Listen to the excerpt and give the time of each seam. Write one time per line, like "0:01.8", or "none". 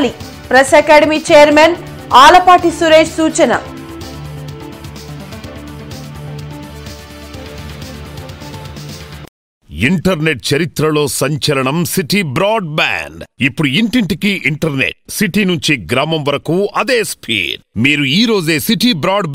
0:09.7